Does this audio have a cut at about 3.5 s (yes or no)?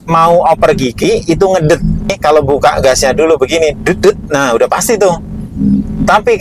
no